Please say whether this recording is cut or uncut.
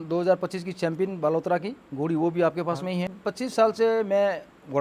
cut